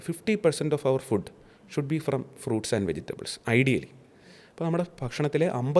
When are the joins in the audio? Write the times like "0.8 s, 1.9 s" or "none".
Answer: none